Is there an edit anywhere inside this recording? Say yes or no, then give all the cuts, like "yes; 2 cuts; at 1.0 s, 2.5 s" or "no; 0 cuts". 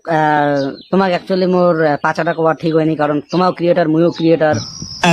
no; 0 cuts